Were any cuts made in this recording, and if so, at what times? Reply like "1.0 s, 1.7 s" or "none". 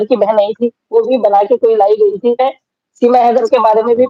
2.4 s